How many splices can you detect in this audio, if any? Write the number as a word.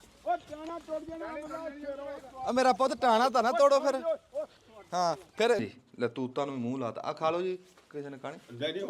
one